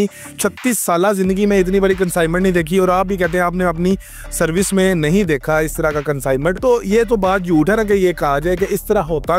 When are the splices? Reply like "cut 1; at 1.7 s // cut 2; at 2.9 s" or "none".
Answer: cut 1; at 6.6 s